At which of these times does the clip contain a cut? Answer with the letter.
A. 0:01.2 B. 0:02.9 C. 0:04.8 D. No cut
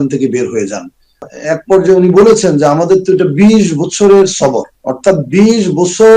A